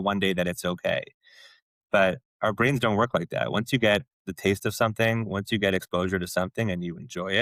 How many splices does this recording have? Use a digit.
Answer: 0